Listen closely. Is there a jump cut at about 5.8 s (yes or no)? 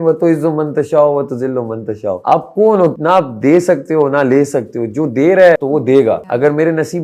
yes